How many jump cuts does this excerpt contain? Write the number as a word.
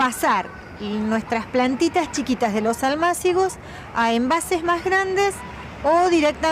one